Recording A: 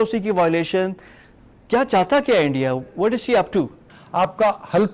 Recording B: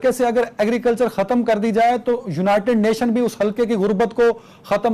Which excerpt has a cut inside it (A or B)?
A